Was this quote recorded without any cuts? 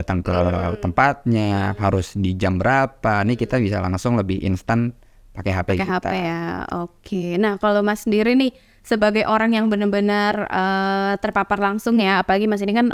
yes; 0 cuts

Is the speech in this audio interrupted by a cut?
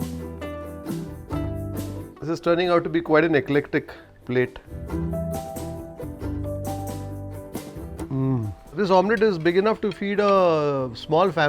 yes; 4 cuts; at 2.2 s, 6.0 s, 8.0 s, 8.8 s

